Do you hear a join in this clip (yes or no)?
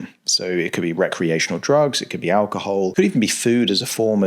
yes